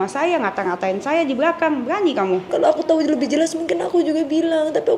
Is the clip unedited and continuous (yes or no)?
no